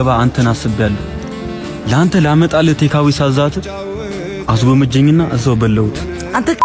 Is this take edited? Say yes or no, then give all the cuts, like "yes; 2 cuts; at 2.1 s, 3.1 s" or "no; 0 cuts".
no; 0 cuts